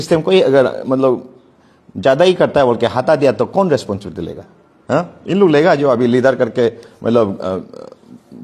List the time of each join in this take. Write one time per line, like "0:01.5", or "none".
none